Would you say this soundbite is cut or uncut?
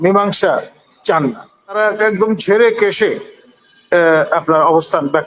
cut